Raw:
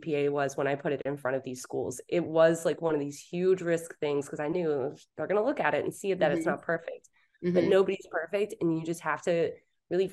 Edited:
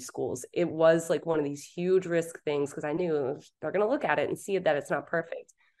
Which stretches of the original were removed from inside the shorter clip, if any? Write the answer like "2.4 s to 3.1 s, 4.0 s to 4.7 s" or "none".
none